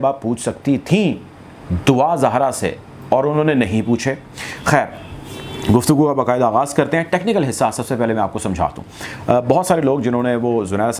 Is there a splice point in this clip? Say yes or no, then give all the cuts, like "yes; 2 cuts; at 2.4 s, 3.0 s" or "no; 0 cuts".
no; 0 cuts